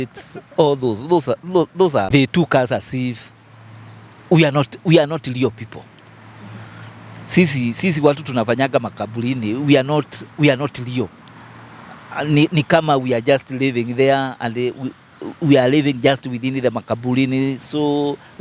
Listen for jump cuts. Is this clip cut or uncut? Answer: cut